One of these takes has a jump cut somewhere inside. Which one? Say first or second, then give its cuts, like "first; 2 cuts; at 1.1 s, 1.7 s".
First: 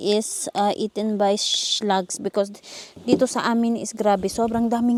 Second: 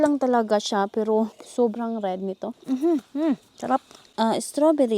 second; 3 cuts; at 1.4 s, 2.6 s, 4.0 s